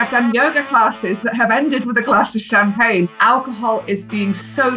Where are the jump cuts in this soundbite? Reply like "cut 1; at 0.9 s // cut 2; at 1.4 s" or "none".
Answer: cut 1; at 3.1 s